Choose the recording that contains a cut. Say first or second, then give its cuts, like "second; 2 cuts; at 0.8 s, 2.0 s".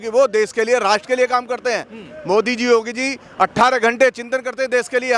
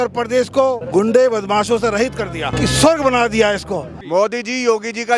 second; 1 cut; at 4.0 s